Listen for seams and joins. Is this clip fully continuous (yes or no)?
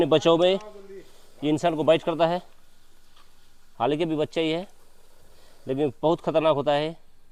yes